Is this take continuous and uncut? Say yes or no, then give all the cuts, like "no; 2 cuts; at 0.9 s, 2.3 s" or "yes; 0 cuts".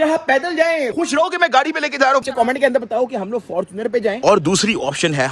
no; 3 cuts; at 0.9 s, 2.3 s, 4.2 s